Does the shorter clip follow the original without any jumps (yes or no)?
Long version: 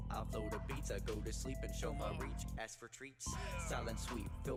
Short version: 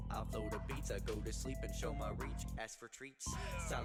yes